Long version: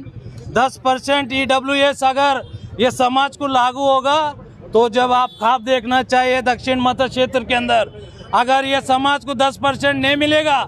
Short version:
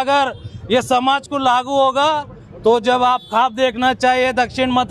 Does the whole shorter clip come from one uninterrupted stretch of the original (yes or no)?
yes